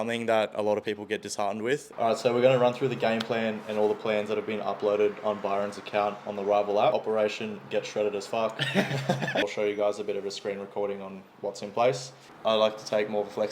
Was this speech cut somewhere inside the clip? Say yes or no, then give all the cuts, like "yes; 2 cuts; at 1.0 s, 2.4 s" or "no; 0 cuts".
yes; 4 cuts; at 1.9 s, 6.9 s, 9.4 s, 12.1 s